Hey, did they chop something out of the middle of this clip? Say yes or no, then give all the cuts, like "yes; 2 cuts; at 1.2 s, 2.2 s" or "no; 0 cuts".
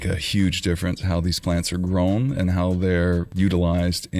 yes; 1 cut; at 3.3 s